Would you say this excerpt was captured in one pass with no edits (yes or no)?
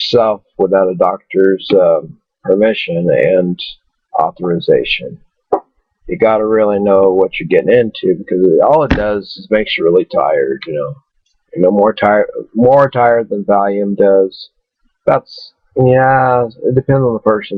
yes